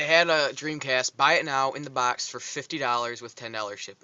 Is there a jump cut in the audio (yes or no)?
yes